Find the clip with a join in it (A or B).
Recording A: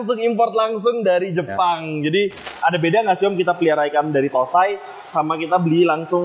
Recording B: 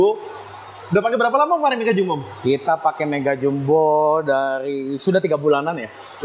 A